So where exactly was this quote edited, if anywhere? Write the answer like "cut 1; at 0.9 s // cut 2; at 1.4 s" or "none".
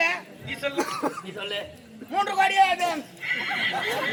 none